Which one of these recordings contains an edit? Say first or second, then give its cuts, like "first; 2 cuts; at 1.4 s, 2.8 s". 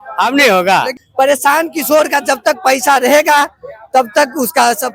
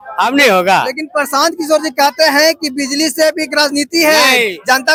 first; 1 cut; at 1.0 s